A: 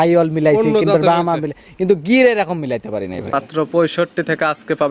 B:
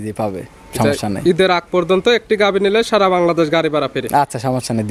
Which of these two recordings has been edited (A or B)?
A